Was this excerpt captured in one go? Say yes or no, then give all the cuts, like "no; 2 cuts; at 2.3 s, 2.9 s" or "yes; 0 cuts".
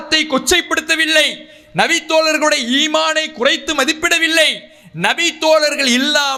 yes; 0 cuts